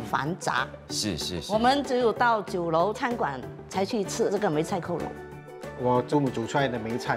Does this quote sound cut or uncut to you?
cut